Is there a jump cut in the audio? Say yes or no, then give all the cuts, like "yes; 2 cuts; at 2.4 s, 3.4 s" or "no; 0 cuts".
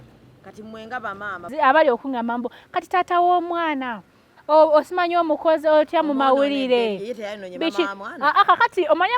yes; 1 cut; at 1.5 s